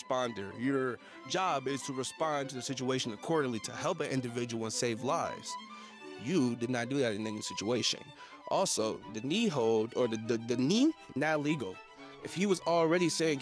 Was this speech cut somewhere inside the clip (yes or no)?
no